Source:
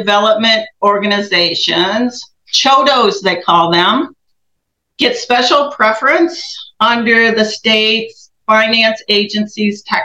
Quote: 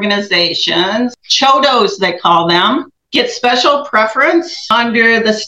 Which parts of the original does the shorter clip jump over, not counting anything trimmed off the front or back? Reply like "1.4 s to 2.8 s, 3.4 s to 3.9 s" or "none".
2.2 s to 2.5 s, 4.2 s to 4.8 s, 6.4 s to 6.7 s

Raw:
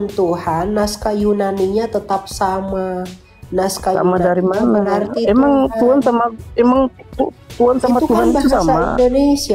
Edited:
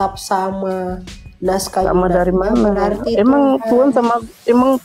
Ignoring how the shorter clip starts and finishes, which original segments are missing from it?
none

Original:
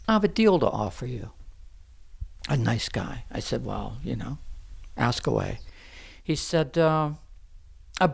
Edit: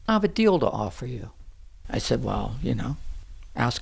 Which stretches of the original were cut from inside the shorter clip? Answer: 1.8 s to 3.2 s

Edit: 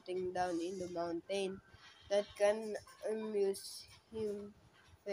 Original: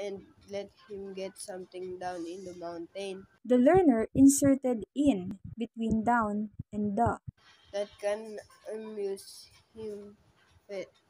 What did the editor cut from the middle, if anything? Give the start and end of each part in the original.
3.3 s to 7.3 s

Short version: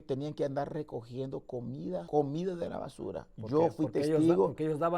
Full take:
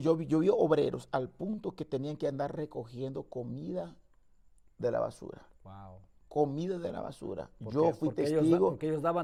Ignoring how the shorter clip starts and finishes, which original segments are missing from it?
3.9 s to 6.3 s

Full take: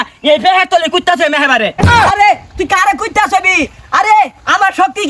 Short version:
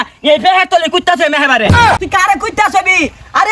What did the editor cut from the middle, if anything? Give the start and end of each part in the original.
1.8 s to 2.4 s

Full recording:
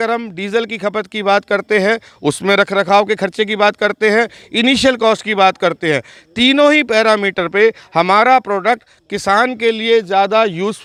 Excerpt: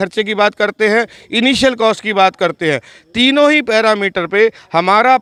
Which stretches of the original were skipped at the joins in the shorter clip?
none

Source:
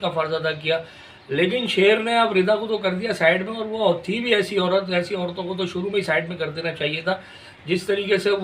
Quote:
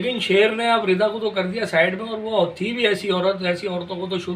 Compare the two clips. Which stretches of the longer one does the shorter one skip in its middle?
none

